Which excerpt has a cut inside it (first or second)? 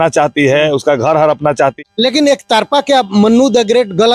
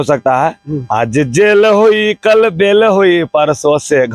first